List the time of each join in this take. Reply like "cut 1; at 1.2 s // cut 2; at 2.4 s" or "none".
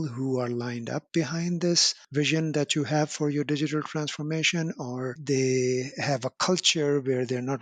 cut 1; at 1.9 s